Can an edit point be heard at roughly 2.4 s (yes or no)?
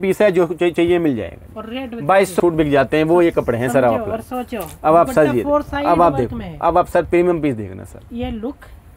yes